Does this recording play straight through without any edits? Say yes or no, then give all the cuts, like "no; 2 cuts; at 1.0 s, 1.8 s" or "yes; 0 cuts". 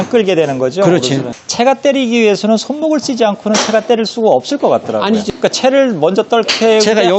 no; 2 cuts; at 1.3 s, 5.3 s